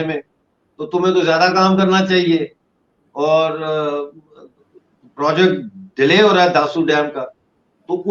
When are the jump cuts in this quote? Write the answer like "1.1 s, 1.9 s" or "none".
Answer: none